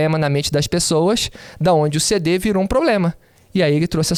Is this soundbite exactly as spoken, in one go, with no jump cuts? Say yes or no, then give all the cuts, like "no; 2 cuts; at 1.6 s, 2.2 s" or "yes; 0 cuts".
yes; 0 cuts